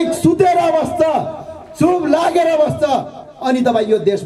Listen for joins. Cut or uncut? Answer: uncut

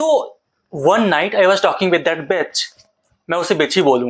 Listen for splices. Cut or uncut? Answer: uncut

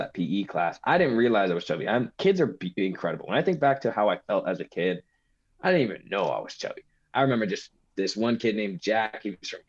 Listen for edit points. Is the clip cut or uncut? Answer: uncut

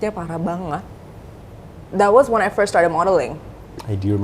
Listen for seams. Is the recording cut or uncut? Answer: uncut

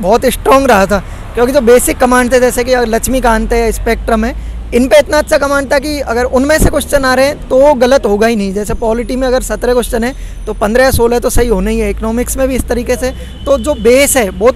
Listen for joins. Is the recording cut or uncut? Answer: uncut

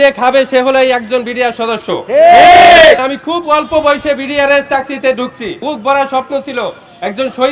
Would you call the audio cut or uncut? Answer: cut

